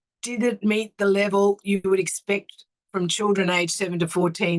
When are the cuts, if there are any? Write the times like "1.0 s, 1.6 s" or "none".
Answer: none